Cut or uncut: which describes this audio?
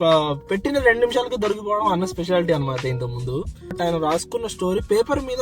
cut